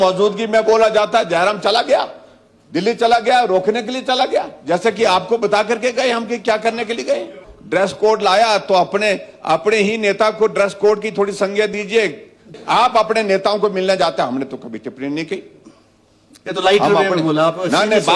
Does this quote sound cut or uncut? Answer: cut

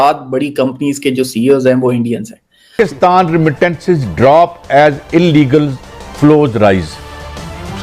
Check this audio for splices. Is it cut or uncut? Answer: cut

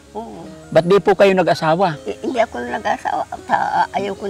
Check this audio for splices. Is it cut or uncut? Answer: cut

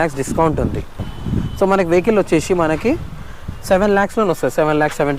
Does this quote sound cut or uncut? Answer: cut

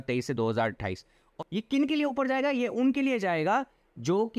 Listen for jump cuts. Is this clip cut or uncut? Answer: cut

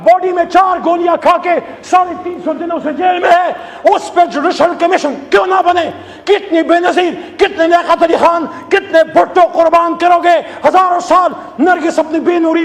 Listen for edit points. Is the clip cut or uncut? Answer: uncut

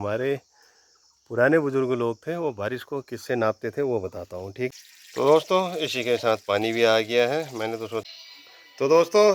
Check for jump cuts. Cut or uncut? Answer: cut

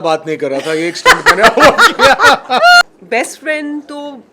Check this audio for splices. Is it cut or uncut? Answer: cut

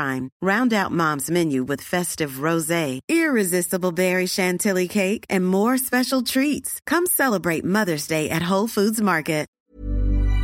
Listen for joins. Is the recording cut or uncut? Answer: cut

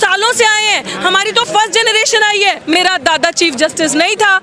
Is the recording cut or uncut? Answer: cut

